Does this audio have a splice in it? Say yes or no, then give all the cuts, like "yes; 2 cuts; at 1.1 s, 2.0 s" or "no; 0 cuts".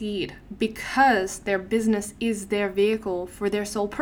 no; 0 cuts